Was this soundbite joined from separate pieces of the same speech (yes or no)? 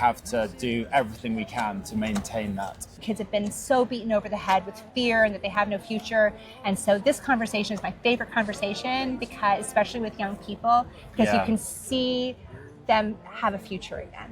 yes